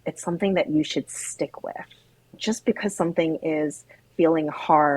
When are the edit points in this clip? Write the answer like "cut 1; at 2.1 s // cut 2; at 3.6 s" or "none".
cut 1; at 2.4 s